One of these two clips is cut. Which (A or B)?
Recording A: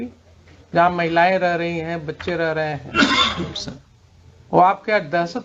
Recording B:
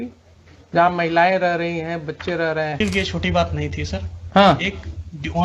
B